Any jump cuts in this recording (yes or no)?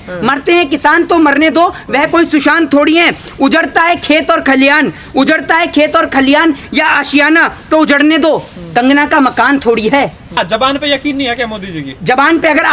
yes